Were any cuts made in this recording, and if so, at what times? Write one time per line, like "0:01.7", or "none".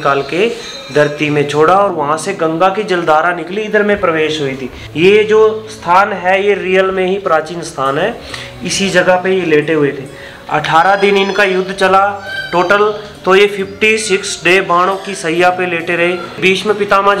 0:01.9
0:04.8
0:16.4